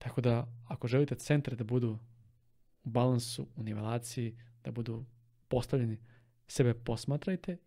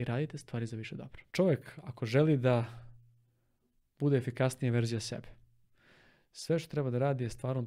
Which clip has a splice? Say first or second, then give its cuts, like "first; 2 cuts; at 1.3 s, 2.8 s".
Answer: second; 1 cut; at 1.2 s